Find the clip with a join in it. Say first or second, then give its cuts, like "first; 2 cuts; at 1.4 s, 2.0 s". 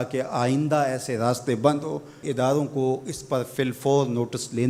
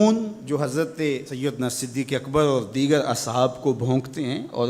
second; 1 cut; at 1.3 s